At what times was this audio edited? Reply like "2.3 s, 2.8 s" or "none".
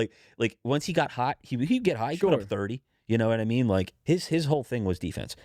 3.9 s